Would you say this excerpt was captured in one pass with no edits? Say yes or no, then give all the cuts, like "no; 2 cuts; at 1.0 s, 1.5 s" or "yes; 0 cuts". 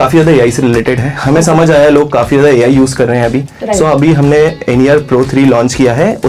yes; 0 cuts